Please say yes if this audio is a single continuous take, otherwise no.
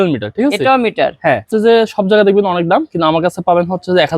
no